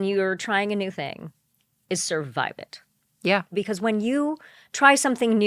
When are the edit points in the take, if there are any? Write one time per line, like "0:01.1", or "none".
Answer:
0:03.5